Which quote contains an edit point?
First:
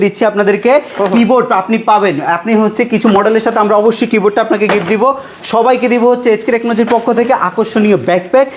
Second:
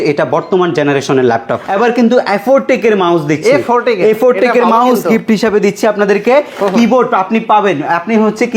second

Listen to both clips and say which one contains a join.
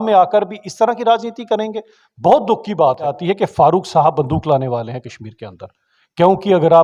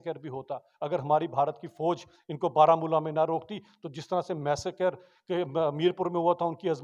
first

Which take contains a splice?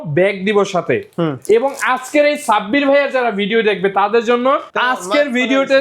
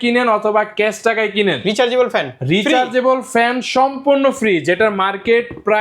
first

